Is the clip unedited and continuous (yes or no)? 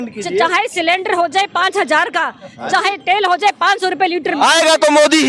yes